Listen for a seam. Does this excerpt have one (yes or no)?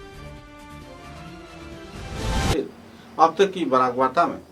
no